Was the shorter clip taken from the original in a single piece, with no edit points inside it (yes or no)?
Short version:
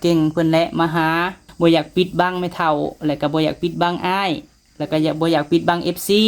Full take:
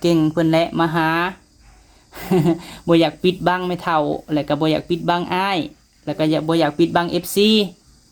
no